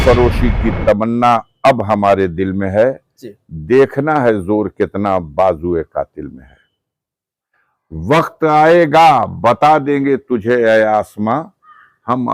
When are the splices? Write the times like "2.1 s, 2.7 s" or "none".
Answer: none